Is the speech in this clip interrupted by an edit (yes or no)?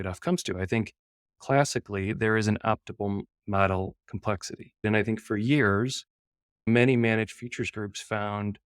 yes